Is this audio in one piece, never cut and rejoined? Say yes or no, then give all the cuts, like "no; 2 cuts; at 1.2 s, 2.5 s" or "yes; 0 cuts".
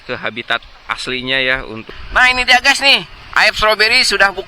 no; 1 cut; at 1.9 s